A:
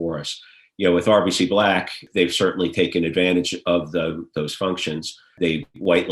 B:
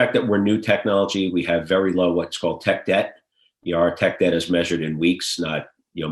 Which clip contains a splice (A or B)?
A